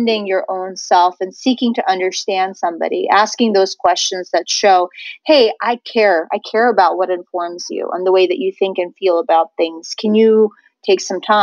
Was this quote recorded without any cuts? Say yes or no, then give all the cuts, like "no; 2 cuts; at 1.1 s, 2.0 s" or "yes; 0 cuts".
yes; 0 cuts